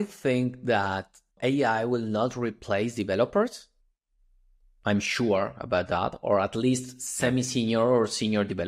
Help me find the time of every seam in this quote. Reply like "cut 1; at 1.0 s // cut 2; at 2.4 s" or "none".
cut 1; at 1.3 s